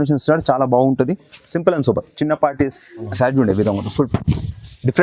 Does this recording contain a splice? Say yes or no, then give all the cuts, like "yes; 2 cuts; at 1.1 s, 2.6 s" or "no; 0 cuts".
yes; 1 cut; at 3.0 s